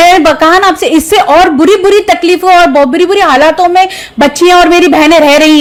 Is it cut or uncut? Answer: uncut